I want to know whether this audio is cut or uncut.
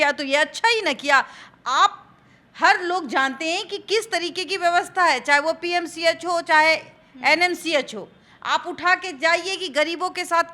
uncut